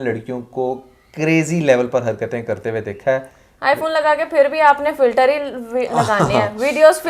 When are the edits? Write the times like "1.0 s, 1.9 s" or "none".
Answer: none